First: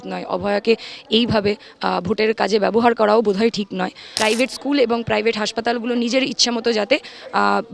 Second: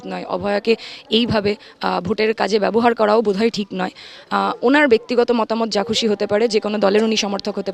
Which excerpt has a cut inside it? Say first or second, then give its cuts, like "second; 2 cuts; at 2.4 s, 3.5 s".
first; 1 cut; at 4.0 s